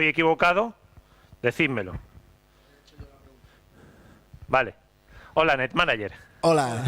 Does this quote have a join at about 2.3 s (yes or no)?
yes